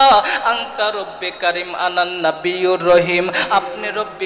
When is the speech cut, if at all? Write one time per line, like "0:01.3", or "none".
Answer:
none